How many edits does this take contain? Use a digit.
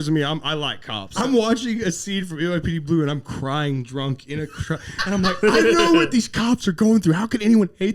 1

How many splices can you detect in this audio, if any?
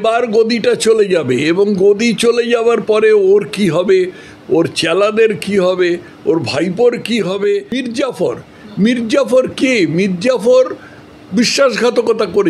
1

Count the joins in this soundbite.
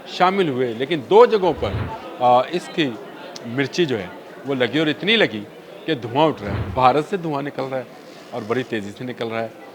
1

